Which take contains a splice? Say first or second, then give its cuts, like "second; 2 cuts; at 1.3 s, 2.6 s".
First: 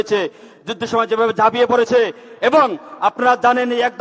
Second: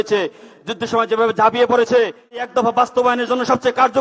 second; 1 cut; at 2.4 s